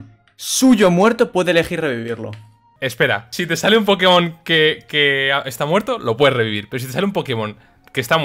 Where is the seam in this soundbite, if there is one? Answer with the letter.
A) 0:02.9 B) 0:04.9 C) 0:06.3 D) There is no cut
A